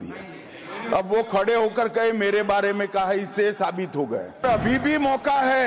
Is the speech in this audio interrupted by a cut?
yes; 1 cut; at 4.4 s

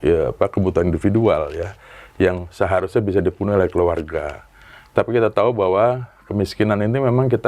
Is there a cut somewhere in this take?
no; 0 cuts

